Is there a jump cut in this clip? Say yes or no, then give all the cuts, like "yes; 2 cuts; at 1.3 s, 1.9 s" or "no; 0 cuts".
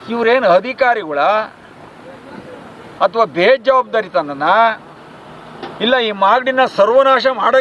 no; 0 cuts